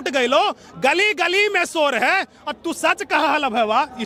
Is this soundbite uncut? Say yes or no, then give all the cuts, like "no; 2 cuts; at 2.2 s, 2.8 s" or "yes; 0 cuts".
yes; 0 cuts